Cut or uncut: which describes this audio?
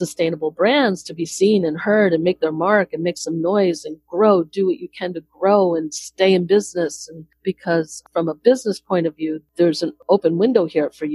cut